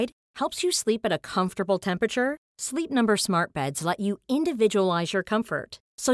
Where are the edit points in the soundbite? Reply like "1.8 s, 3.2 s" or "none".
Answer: none